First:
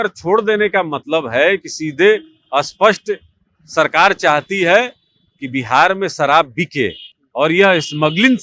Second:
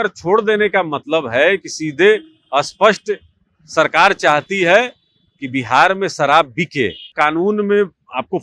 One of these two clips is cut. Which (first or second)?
second